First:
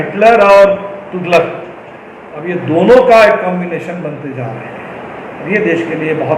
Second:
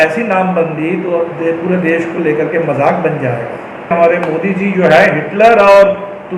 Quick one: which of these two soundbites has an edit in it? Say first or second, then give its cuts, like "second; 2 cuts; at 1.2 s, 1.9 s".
second; 1 cut; at 3.9 s